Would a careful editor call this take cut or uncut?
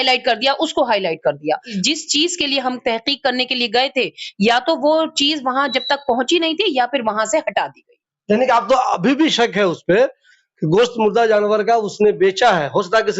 cut